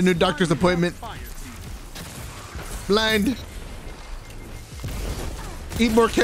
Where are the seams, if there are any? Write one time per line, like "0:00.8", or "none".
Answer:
none